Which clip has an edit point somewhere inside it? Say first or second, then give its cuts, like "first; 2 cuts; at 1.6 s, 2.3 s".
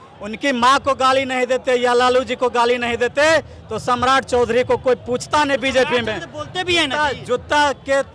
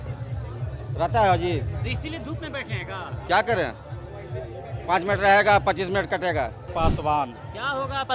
second; 1 cut; at 6.7 s